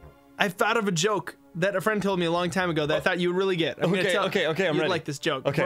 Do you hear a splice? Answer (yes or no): no